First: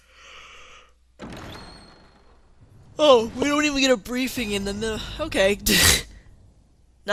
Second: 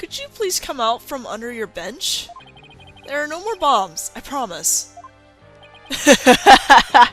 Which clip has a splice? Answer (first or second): second